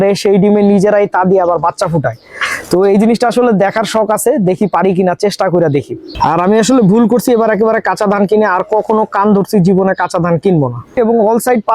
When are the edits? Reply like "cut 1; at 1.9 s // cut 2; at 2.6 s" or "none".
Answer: cut 1; at 6.0 s // cut 2; at 11.0 s